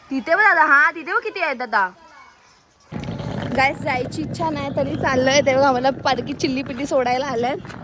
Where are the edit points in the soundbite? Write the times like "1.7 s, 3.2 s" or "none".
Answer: 2.9 s